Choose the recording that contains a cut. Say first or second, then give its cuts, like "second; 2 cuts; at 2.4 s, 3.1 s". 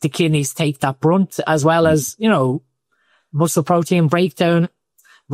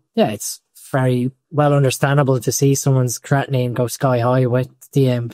second; 1 cut; at 1.4 s